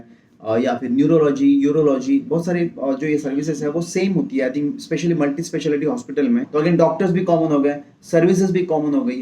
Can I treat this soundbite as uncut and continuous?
no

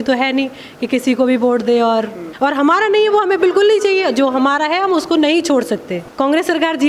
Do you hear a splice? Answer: yes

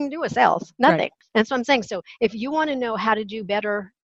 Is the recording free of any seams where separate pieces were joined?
no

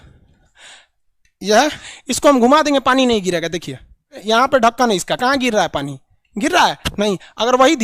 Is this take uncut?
no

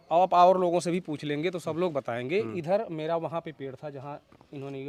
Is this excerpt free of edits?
yes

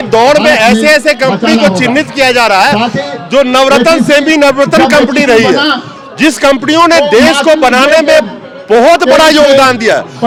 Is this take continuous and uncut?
yes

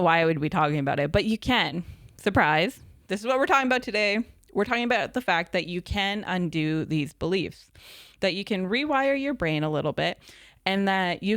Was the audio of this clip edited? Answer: no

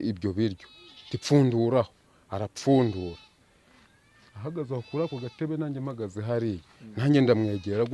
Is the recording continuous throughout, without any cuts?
yes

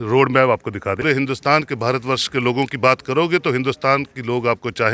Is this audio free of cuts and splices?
no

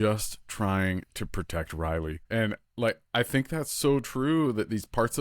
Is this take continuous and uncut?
no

